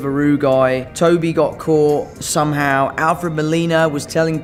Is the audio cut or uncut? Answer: uncut